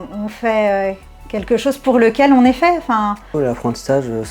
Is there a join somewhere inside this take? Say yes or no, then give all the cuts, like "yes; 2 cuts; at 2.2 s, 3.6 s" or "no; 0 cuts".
yes; 1 cut; at 3.3 s